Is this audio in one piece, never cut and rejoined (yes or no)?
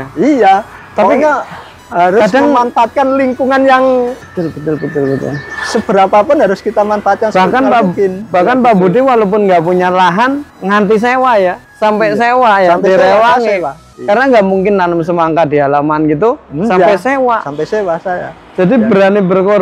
yes